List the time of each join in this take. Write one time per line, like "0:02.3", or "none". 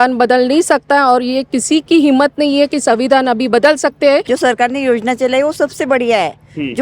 0:04.2